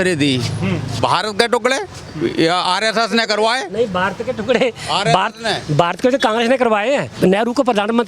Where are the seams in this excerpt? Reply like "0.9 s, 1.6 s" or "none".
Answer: 1.0 s, 7.1 s